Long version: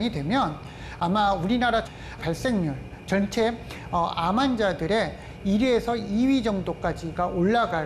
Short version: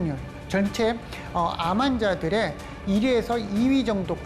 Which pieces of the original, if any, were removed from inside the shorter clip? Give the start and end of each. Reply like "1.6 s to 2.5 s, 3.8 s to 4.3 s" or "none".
none

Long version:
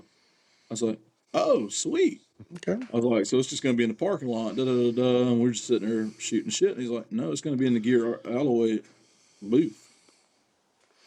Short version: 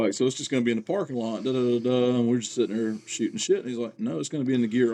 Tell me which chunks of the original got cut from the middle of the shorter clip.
none

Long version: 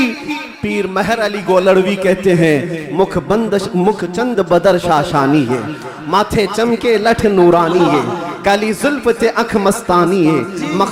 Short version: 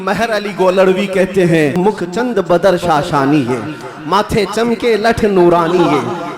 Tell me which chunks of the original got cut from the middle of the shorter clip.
2.6 s to 3.8 s

